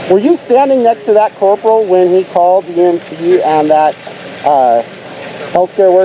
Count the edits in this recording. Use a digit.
0